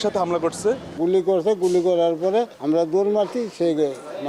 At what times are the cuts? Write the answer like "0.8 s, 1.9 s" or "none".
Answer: 2.5 s